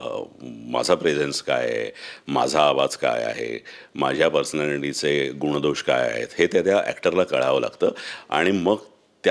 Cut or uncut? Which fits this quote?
uncut